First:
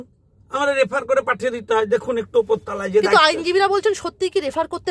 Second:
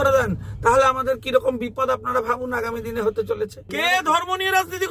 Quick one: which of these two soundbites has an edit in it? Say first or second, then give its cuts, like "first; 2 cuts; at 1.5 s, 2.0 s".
second; 1 cut; at 3.7 s